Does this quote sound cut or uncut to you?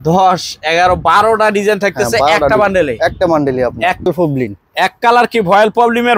cut